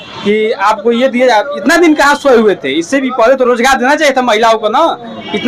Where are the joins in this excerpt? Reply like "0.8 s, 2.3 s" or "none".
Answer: none